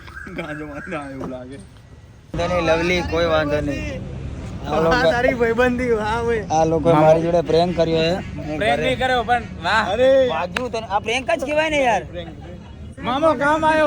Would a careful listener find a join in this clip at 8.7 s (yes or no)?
no